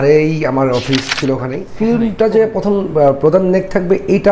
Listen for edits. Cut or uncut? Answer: cut